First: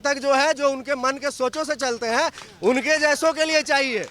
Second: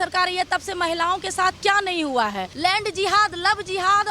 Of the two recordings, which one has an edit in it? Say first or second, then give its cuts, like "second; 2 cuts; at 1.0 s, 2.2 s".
second; 1 cut; at 2.5 s